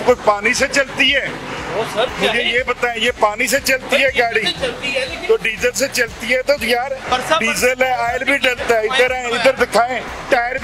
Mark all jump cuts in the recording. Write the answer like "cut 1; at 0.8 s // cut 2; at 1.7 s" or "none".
none